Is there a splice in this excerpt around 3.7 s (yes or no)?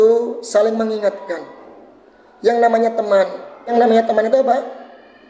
yes